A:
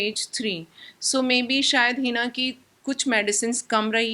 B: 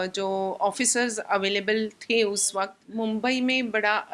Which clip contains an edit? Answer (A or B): B